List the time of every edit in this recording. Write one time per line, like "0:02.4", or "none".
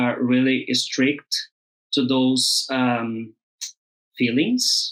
none

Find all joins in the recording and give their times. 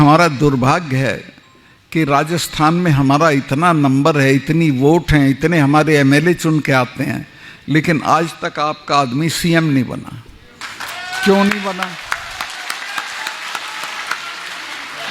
none

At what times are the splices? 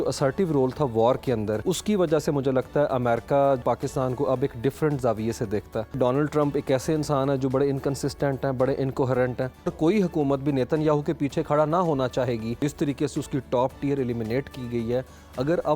0:01.6
0:03.6
0:06.0
0:09.7
0:12.5

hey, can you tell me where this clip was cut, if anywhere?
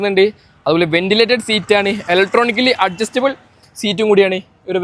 none

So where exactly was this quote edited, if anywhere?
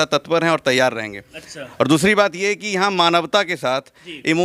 none

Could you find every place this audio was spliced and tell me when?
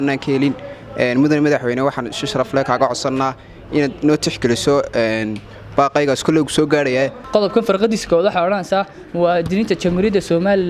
0:07.2

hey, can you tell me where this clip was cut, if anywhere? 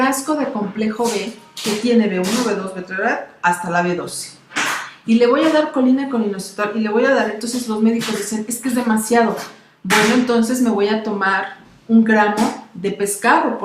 0:11.7

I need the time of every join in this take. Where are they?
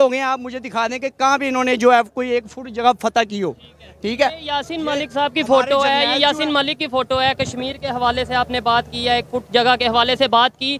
none

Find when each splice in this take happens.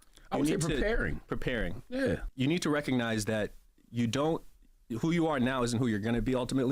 0:02.3

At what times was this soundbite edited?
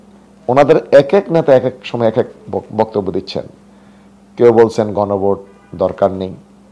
none

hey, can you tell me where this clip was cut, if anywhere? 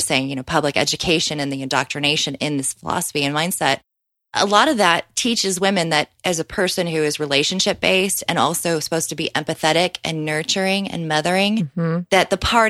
none

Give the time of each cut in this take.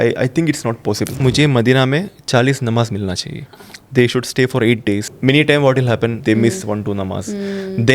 0:01.2
0:05.1
0:06.2

